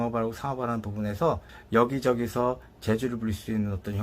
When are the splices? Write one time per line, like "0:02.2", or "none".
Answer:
0:01.5